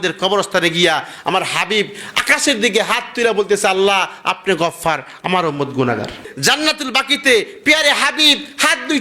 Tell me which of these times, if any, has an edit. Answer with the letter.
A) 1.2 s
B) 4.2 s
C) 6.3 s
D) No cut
C